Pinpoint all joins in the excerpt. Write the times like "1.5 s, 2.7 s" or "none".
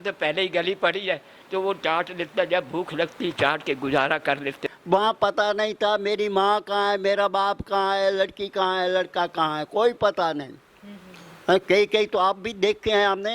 4.7 s